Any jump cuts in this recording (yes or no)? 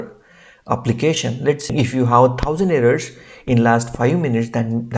no